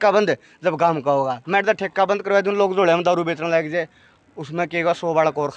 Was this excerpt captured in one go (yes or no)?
yes